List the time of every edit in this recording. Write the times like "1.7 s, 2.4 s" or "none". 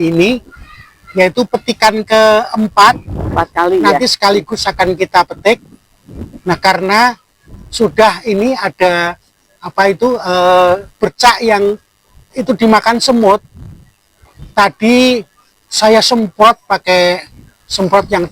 none